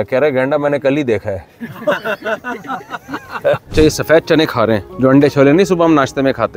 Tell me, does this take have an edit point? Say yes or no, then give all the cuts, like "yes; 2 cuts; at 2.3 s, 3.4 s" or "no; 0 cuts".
yes; 2 cuts; at 3.7 s, 4.9 s